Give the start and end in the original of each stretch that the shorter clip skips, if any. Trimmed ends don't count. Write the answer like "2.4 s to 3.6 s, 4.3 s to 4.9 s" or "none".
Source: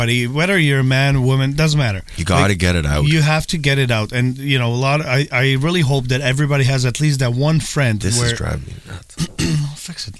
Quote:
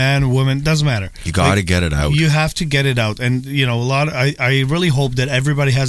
none